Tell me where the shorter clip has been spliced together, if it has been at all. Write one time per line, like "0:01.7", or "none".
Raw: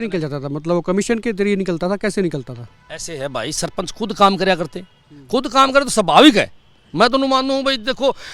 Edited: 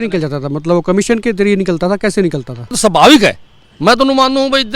0:02.8

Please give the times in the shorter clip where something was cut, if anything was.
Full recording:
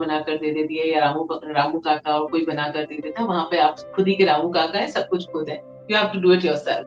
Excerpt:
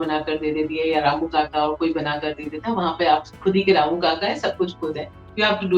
0:01.0

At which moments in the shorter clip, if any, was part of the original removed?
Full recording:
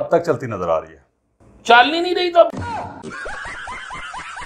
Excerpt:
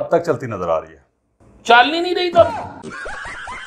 0:02.5

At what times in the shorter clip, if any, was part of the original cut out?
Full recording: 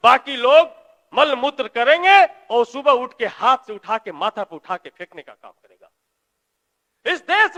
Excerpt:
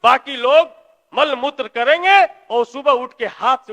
none

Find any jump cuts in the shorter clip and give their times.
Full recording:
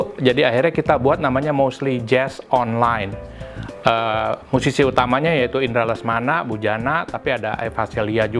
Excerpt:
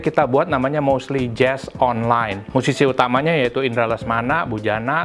0:02.4

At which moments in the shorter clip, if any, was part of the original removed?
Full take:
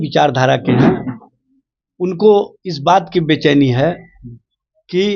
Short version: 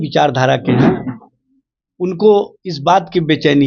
none

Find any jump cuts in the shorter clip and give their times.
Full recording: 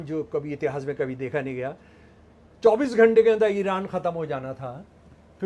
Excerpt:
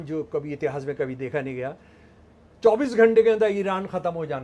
none

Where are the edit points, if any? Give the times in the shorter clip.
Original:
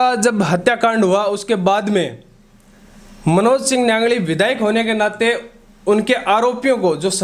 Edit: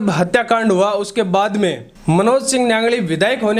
0:01.9

